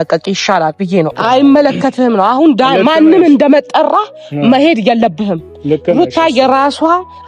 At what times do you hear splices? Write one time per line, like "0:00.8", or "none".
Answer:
0:01.2